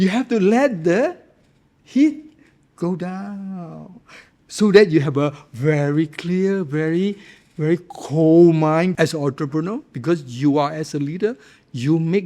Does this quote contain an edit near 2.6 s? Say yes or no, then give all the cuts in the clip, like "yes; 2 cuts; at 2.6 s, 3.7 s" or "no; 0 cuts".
no; 1 cut; at 8.9 s